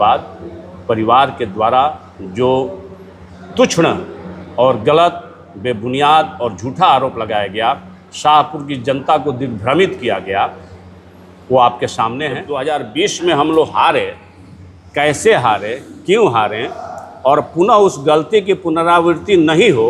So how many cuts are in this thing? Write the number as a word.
one